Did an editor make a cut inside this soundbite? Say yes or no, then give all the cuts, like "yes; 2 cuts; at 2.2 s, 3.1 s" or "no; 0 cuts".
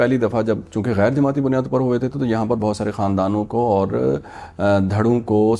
no; 0 cuts